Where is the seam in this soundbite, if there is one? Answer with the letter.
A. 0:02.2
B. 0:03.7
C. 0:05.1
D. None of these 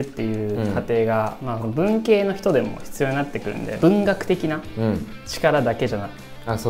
B